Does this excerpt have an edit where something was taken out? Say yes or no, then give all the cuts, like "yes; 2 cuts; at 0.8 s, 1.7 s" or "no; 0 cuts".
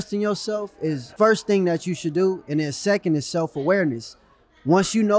yes; 1 cut; at 1.0 s